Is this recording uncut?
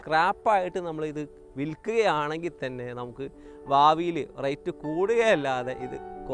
yes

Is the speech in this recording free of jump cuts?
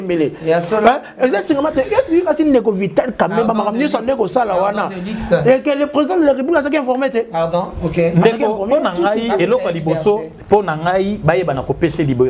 yes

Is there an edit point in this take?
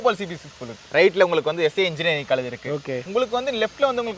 yes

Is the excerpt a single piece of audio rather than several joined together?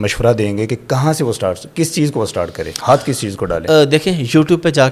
yes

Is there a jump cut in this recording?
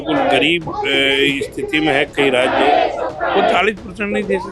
no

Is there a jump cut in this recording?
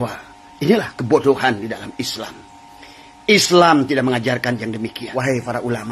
yes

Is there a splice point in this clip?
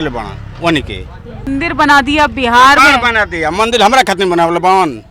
yes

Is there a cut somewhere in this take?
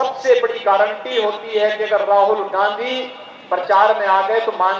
no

